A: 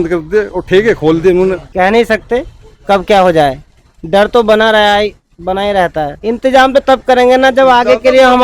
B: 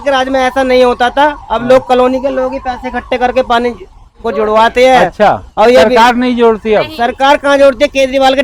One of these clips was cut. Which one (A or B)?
A